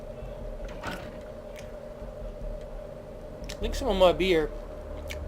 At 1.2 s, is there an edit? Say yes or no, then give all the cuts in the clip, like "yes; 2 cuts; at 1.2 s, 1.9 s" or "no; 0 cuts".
no; 1 cut; at 2.6 s